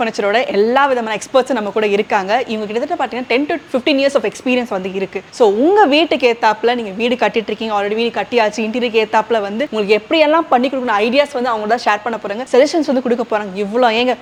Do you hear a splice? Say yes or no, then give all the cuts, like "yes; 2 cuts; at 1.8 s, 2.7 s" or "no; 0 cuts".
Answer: no; 0 cuts